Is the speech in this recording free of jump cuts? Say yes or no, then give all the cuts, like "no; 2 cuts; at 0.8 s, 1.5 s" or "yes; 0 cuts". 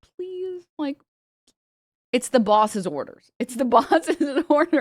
yes; 0 cuts